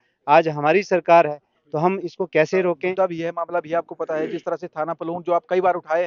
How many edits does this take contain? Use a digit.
1